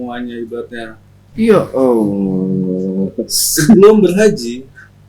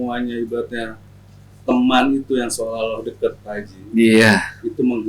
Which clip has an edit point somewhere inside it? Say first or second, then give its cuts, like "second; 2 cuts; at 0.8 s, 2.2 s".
first; 1 cut; at 1.2 s